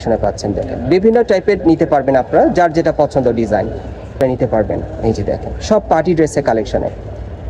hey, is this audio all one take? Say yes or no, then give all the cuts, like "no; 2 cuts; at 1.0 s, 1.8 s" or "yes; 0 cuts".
no; 1 cut; at 4.2 s